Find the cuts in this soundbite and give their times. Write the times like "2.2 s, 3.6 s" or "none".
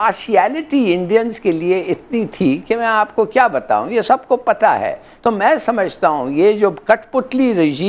none